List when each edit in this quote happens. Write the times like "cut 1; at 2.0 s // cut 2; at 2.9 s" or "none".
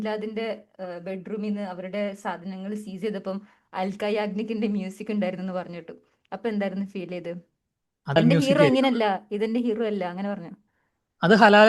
cut 1; at 8.2 s

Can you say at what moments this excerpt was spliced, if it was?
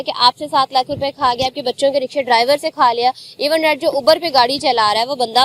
none

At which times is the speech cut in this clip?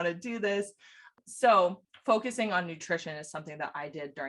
cut 1; at 1.1 s // cut 2; at 1.9 s

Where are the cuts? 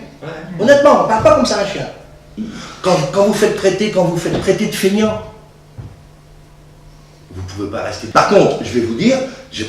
cut 1; at 8.1 s

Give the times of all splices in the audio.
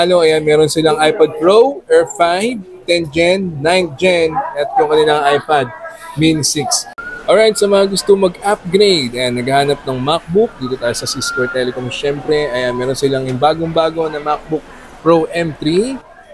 cut 1; at 6.9 s

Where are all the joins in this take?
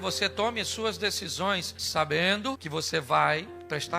cut 1; at 1.8 s // cut 2; at 2.6 s

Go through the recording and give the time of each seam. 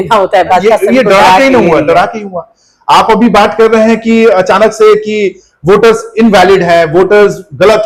none

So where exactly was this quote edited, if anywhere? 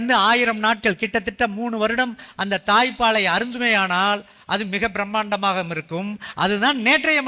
none

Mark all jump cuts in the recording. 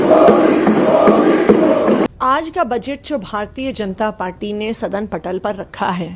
cut 1; at 2.1 s

